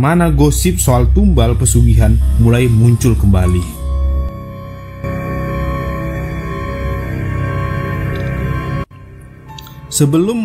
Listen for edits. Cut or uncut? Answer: uncut